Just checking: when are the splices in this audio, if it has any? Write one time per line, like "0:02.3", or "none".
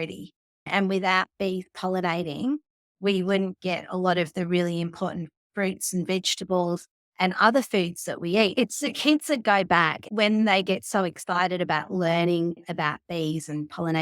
0:08.5
0:10.0